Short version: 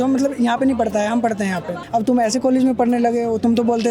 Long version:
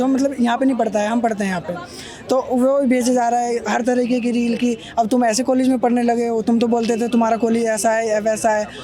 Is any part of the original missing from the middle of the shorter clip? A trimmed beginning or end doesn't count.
yes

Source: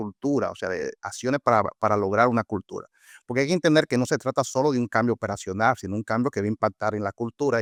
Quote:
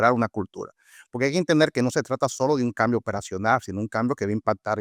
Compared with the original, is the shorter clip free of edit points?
yes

